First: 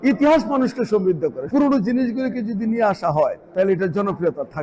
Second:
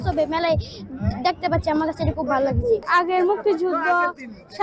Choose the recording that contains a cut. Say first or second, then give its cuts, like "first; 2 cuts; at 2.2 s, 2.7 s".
first; 2 cuts; at 1.5 s, 3.4 s